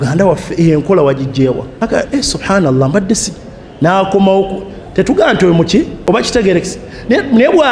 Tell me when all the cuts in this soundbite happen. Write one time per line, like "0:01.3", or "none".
0:01.7
0:05.9